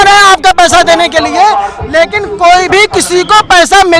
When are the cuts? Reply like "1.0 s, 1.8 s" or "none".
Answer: none